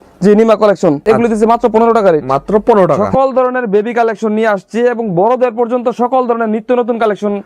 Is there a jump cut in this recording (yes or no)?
yes